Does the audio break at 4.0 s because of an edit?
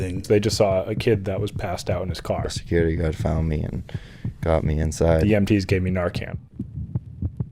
no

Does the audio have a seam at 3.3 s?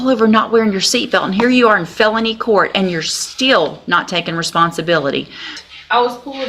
no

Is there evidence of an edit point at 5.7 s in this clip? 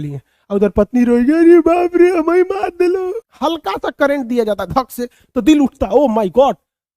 no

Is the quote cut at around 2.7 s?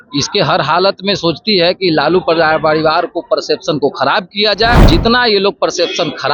no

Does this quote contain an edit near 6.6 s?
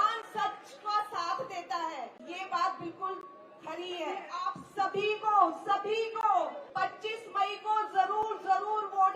yes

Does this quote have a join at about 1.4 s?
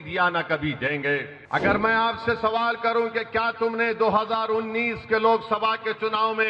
yes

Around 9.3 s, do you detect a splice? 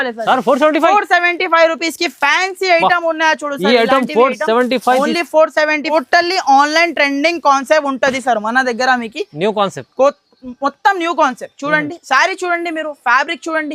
no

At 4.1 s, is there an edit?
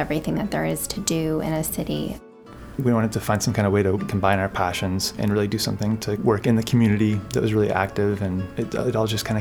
yes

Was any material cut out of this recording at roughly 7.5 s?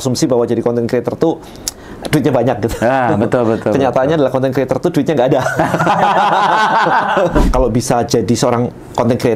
yes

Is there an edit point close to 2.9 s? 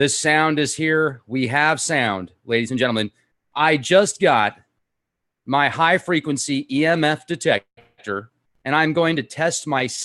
yes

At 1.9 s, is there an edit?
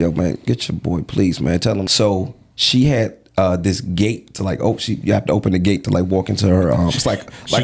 yes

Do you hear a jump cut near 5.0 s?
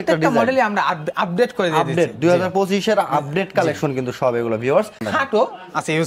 yes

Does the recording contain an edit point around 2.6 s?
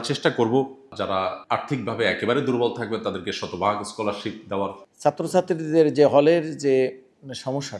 no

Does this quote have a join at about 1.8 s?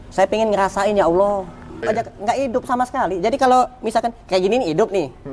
yes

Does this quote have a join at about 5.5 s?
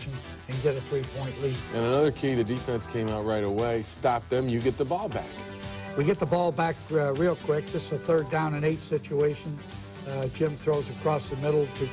no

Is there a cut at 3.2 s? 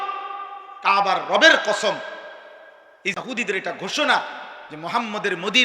yes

